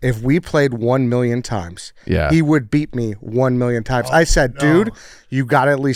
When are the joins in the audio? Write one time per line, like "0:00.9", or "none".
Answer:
none